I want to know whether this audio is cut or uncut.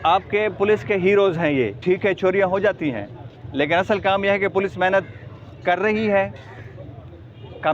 cut